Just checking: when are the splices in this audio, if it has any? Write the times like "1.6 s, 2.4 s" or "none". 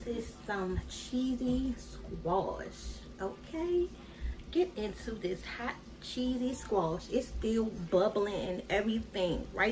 none

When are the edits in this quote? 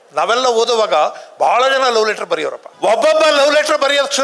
2.6 s

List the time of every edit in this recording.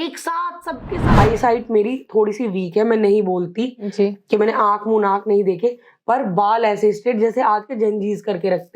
1.1 s

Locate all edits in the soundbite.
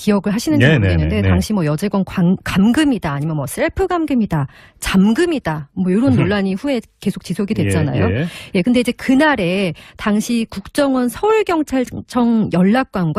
none

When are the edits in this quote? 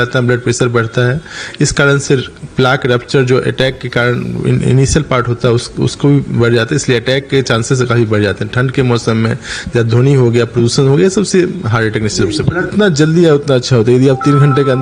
12.7 s

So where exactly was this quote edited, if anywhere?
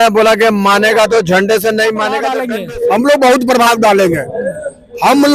2.4 s

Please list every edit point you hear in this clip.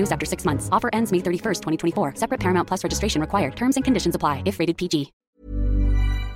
5.2 s

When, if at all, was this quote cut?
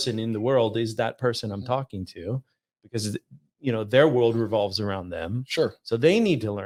none

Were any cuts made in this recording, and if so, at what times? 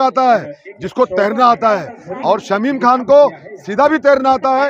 none

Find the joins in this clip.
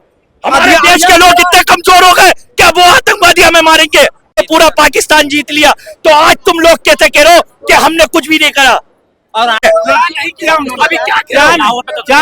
4.4 s, 9.6 s

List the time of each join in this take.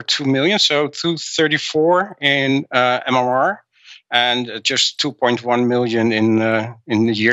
none

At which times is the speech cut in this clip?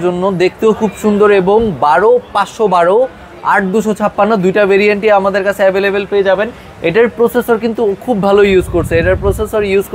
none

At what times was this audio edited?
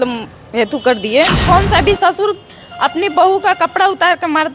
1.4 s

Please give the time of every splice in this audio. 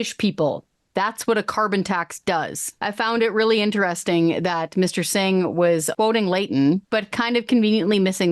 2.6 s, 5.9 s, 6.8 s

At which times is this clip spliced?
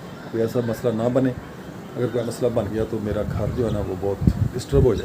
2.2 s

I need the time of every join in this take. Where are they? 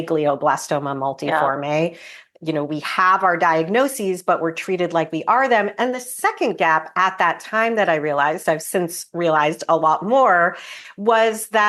none

